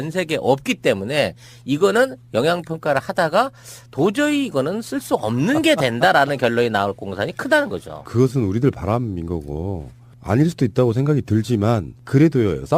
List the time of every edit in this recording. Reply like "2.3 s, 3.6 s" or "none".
4.1 s